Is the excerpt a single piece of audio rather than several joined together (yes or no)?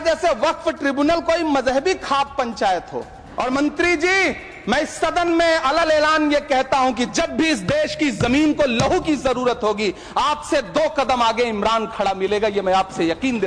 no